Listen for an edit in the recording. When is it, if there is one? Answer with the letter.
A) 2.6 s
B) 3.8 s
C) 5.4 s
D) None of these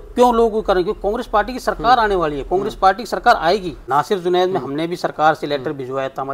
B